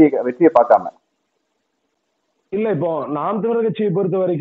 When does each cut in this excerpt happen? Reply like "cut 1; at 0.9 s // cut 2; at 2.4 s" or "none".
none